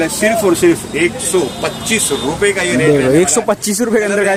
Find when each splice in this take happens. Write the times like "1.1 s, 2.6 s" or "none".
none